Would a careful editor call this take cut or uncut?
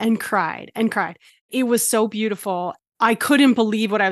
uncut